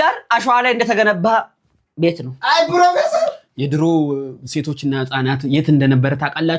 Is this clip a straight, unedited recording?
yes; 0 cuts

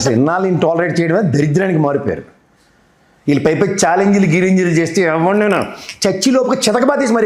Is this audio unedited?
yes; 0 cuts

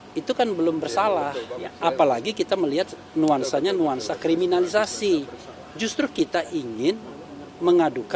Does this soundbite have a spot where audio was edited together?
no; 0 cuts

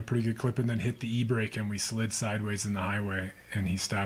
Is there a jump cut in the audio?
no; 0 cuts

